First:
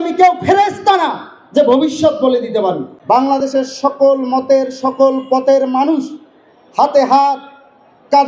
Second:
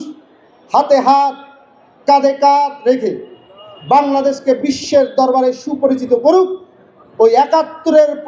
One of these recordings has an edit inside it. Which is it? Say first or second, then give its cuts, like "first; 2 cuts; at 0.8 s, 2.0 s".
first; 1 cut; at 2.9 s